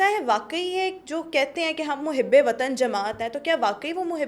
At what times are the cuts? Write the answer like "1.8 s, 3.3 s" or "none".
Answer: none